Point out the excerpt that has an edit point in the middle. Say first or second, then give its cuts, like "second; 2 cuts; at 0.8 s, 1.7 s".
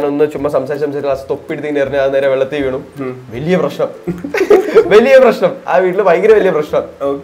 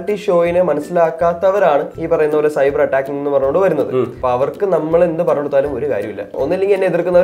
second; 3 cuts; at 1.9 s, 4.1 s, 6.3 s